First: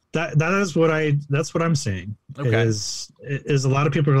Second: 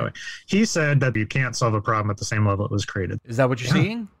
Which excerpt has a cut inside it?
second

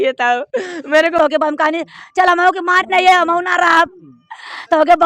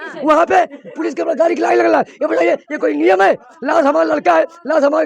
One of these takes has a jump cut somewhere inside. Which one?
first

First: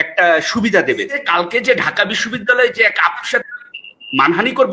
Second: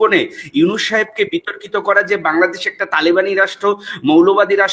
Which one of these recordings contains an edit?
first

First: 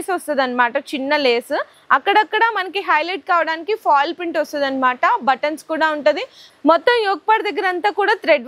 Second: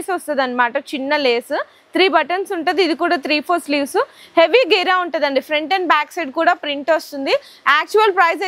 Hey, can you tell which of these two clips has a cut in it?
first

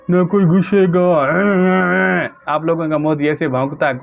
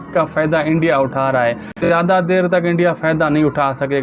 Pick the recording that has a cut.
second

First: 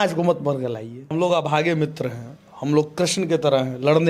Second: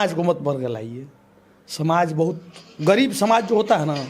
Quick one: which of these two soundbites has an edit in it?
first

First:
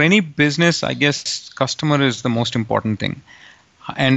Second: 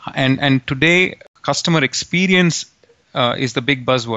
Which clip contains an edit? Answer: second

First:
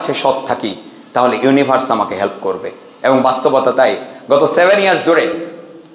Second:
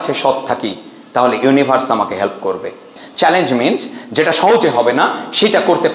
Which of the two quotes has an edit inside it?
second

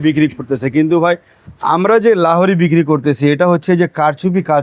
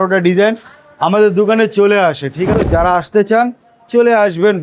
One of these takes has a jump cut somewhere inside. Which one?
second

